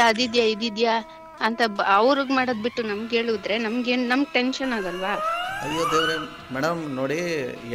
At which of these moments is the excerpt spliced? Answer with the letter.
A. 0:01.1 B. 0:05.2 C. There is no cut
C